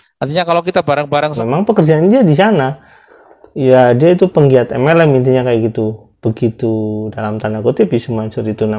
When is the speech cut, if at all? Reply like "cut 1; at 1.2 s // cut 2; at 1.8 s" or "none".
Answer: cut 1; at 1.4 s